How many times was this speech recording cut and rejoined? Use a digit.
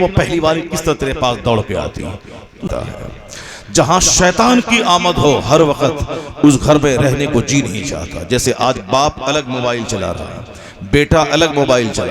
1